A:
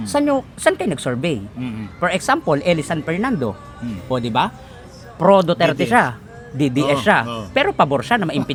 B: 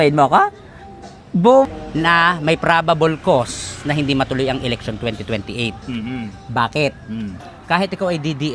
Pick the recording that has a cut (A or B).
B